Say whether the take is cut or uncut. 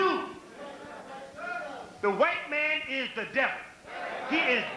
cut